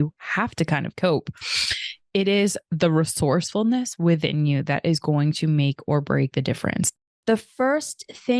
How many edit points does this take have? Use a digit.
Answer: 1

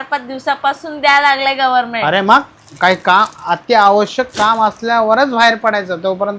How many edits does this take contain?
0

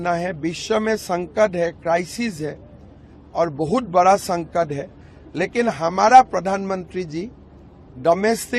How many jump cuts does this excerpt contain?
0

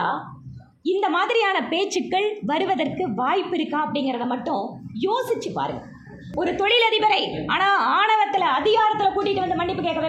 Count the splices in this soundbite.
1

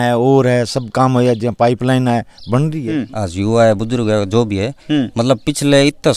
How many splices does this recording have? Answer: 1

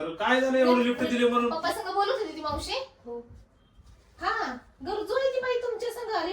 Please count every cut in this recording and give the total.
1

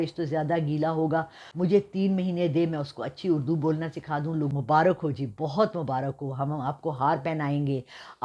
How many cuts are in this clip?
2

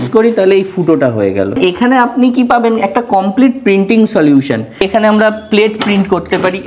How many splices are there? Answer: 2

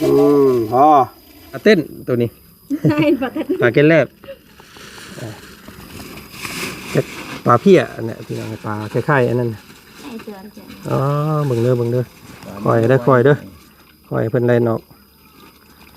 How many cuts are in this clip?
1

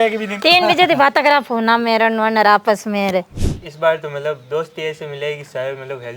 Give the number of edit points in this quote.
1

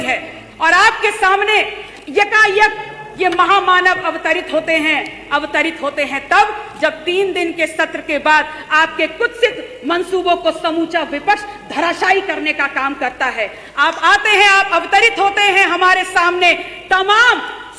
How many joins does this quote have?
0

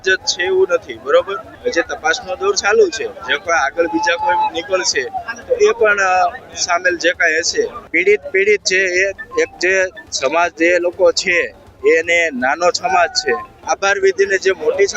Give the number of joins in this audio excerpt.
3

